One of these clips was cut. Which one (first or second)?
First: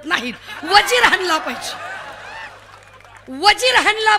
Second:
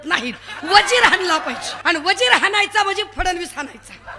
second